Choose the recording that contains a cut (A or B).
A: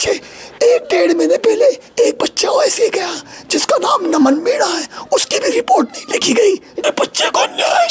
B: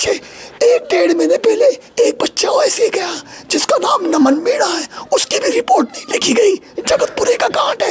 A